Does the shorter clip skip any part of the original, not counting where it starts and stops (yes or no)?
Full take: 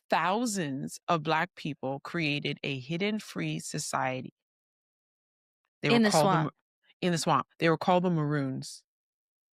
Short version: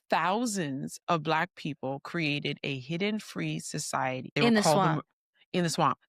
yes